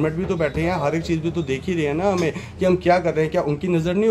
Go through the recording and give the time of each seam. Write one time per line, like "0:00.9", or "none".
none